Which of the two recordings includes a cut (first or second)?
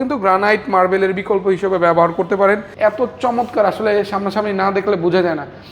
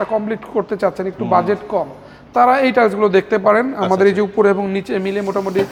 first